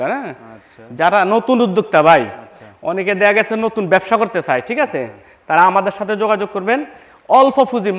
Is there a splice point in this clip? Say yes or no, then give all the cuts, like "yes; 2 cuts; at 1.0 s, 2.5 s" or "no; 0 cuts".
no; 0 cuts